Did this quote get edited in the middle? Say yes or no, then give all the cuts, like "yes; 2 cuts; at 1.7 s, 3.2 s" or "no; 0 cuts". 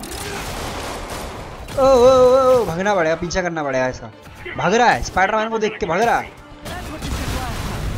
yes; 1 cut; at 1.7 s